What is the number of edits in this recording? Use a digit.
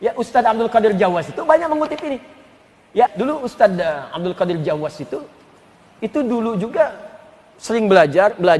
1